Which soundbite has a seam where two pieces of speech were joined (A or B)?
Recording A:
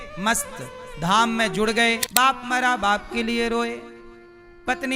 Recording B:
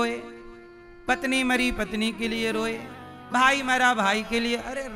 A